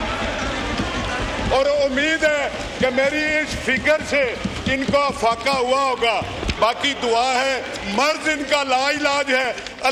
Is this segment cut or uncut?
uncut